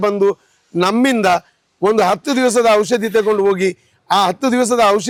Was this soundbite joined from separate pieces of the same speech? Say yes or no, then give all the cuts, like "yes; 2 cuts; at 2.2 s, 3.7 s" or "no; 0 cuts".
no; 0 cuts